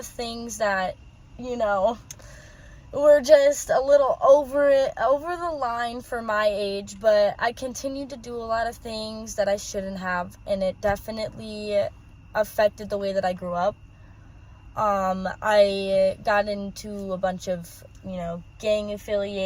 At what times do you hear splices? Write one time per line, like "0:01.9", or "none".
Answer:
none